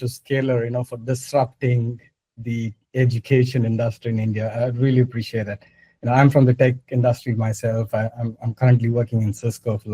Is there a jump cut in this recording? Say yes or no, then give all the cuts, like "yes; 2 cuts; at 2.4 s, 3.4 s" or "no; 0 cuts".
no; 0 cuts